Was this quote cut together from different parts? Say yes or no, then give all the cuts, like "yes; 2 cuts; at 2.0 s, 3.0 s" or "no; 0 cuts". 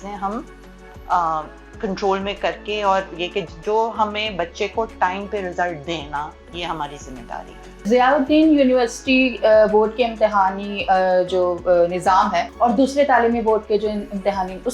yes; 2 cuts; at 7.9 s, 12.5 s